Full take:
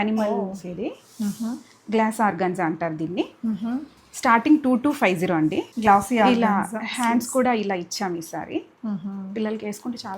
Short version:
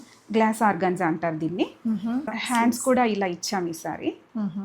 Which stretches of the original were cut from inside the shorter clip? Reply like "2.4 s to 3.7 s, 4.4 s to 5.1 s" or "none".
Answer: 3.9 s to 6.8 s